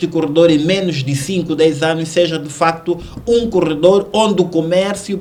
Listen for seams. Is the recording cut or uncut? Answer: uncut